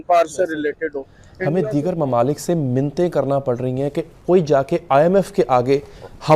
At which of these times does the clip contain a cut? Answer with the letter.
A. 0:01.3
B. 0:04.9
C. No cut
A